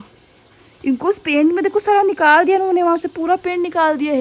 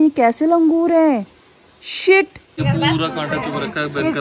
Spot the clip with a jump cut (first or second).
second